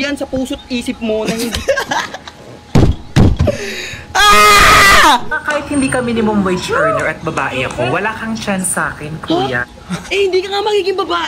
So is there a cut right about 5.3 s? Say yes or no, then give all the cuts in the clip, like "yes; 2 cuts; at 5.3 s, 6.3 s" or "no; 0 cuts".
yes; 1 cut; at 5.3 s